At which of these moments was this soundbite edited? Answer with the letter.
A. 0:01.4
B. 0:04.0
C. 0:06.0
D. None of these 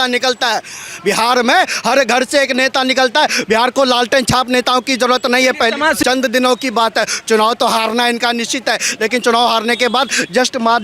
C